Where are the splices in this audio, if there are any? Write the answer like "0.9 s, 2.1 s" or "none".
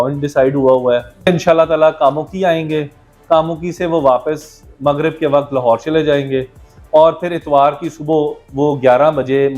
1.2 s